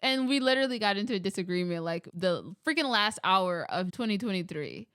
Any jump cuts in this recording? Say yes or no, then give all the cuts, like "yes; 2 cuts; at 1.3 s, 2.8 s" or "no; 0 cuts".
yes; 2 cuts; at 2.1 s, 3.9 s